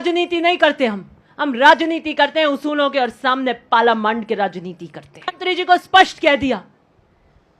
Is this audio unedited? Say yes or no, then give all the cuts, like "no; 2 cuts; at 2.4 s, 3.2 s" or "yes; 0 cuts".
no; 1 cut; at 5.4 s